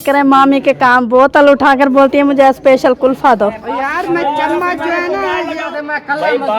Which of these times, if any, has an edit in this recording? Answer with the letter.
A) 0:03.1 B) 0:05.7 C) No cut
B